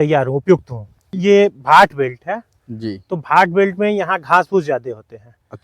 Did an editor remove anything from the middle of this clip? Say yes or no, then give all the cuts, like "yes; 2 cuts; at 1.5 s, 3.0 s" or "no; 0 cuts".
yes; 1 cut; at 1.1 s